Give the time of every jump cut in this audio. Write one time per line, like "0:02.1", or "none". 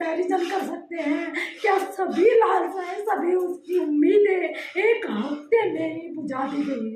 none